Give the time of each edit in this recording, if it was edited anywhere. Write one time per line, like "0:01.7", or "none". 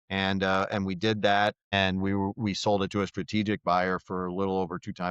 0:01.6